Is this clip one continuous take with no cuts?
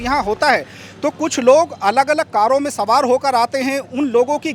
yes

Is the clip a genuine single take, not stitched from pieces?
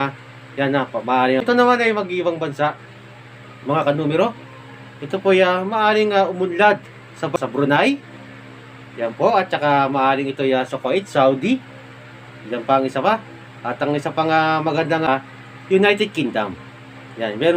no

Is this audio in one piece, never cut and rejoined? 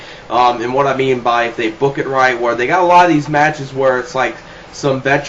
no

